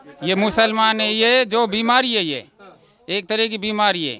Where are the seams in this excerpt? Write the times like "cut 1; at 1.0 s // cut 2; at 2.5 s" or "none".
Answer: none